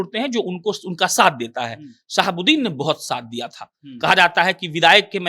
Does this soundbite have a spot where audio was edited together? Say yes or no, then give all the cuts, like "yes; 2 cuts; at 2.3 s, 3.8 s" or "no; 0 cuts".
no; 0 cuts